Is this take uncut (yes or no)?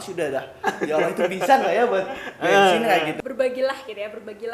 no